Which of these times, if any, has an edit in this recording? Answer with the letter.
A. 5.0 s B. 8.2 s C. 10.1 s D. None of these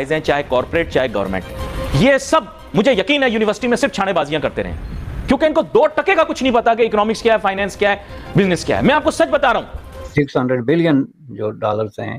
D